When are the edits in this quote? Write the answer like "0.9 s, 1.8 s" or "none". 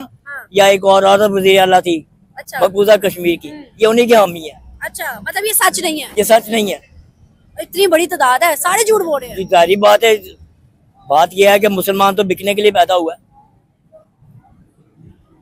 none